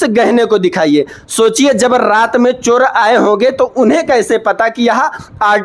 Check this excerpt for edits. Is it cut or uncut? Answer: uncut